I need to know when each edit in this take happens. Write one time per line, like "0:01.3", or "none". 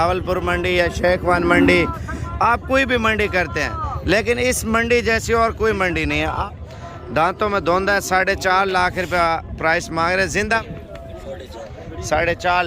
0:06.5
0:10.6